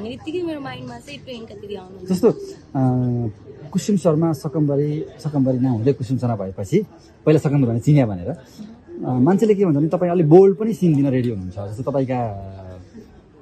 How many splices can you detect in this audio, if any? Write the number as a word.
zero